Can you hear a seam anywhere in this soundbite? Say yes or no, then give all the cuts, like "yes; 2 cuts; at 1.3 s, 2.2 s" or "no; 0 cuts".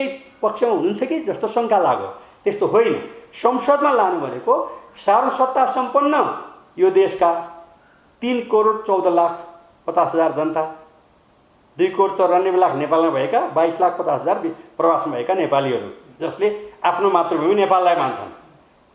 no; 0 cuts